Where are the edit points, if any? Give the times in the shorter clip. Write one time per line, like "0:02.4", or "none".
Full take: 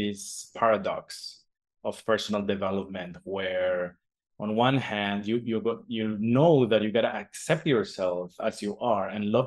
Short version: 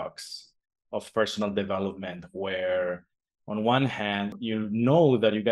0:04.3